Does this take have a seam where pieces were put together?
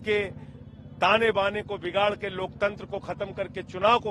no; 0 cuts

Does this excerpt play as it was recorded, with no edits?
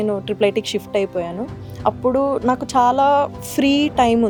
yes; 0 cuts

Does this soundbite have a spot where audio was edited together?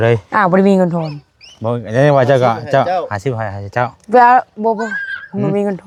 no; 0 cuts

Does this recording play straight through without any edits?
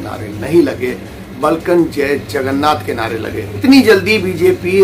yes; 0 cuts

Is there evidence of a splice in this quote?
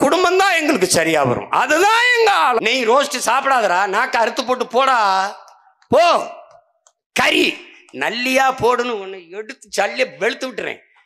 yes; 1 cut; at 2.6 s

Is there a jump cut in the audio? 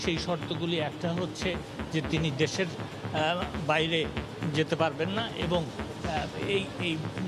no; 0 cuts

